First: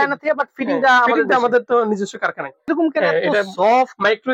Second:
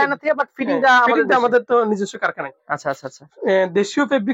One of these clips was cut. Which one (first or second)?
first